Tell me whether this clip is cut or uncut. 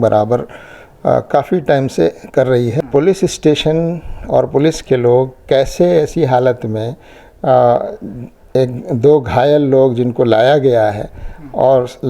cut